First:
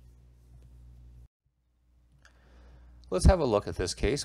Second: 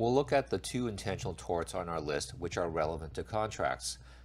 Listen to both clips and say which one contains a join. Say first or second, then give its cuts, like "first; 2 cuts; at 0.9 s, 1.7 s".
first; 1 cut; at 1.4 s